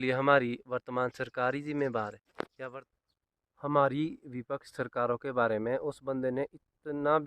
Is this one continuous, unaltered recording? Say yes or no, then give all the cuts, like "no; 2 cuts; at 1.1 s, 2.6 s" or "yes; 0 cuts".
no; 1 cut; at 3.4 s